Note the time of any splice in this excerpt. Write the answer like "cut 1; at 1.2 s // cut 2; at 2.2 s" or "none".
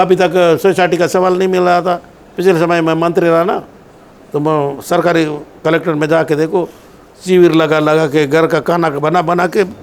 none